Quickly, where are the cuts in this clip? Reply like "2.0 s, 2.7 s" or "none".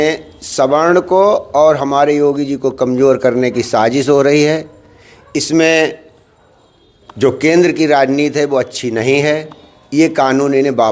none